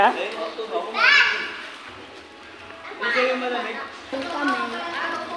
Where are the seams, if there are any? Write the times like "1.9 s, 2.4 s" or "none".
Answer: 4.1 s